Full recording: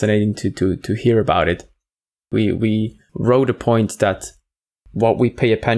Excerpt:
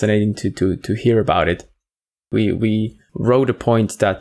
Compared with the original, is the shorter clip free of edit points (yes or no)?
yes